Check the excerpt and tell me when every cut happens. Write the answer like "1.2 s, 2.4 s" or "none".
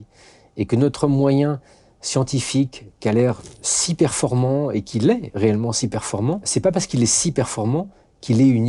6.4 s